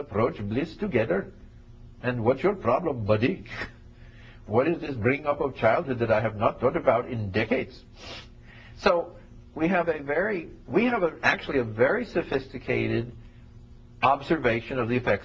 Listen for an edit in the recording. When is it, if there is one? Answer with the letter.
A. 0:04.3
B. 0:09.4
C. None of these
A